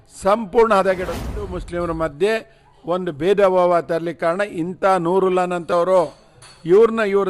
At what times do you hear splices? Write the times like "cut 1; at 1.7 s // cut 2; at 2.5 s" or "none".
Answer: cut 1; at 1.2 s